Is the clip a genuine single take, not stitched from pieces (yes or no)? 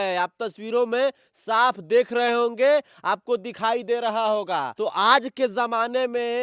yes